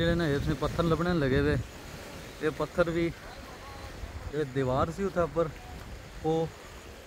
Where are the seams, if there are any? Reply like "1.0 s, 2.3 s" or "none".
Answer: none